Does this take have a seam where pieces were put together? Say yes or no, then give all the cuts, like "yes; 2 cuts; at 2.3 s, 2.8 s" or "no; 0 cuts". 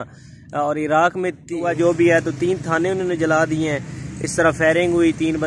yes; 1 cut; at 1.7 s